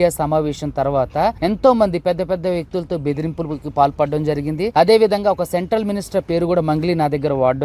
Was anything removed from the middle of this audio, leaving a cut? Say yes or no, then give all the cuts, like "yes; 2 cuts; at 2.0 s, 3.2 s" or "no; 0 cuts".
yes; 2 cuts; at 1.4 s, 4.7 s